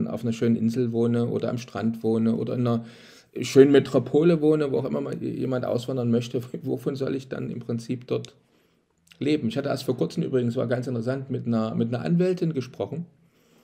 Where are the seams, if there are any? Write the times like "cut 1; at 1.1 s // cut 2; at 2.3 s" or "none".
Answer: none